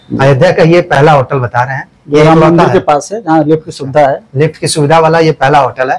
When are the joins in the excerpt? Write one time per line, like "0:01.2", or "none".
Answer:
none